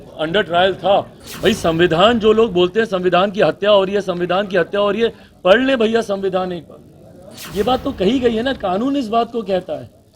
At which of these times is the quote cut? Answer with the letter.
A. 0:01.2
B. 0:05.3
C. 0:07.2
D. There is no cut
A